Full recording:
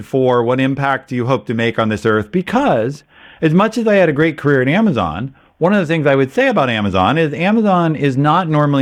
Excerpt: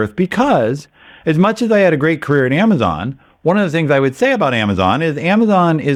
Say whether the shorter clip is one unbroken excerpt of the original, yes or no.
yes